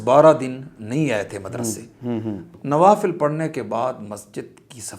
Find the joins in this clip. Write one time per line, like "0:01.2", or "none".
0:02.4

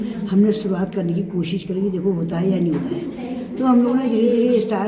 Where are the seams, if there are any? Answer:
0:03.3

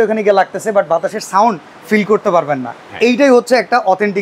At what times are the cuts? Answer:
none

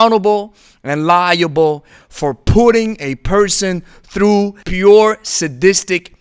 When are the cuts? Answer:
none

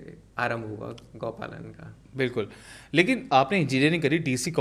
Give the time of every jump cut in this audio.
none

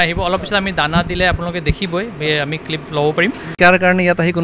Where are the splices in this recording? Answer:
0:03.5

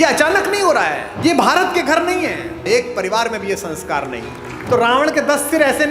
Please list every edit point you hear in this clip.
0:01.1
0:04.5

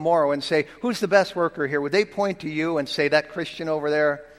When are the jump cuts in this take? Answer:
none

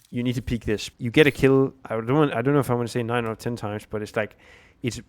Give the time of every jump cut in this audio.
0:00.9
0:01.9

